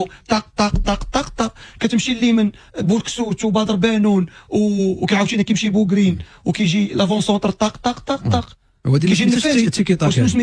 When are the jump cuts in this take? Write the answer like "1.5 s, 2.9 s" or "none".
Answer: none

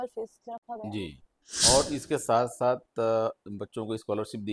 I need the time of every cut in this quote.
1.7 s

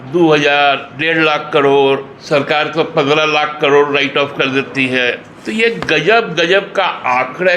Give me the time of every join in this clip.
0.9 s, 2.1 s, 5.3 s

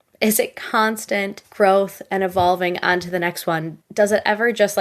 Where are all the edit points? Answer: 1.4 s

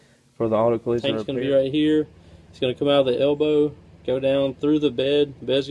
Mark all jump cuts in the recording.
1.2 s

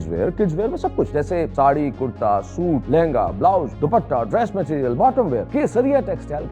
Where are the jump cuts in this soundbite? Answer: 1.2 s, 2.8 s, 3.7 s, 5.5 s

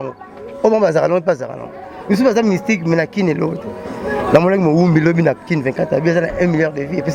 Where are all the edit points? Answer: none

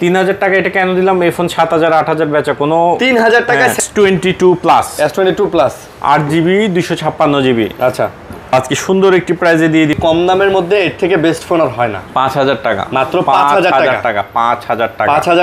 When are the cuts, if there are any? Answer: 3.8 s, 9.9 s

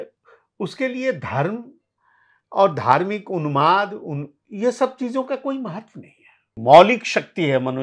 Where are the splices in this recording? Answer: 6.6 s

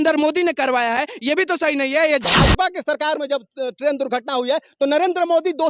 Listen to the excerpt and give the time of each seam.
2.2 s

